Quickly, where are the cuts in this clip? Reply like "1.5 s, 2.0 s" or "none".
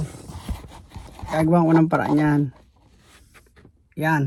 none